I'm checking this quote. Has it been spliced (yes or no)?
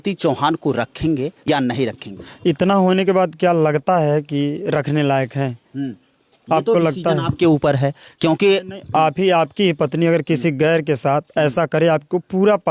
yes